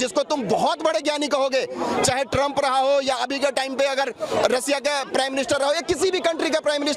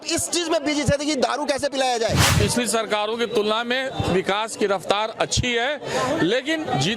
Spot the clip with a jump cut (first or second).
second